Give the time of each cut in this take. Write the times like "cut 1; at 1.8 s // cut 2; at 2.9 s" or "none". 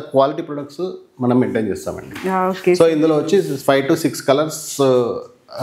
none